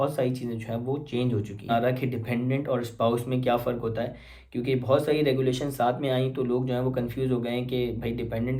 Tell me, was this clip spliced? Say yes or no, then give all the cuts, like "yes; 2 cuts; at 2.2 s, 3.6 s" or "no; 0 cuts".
yes; 1 cut; at 1.7 s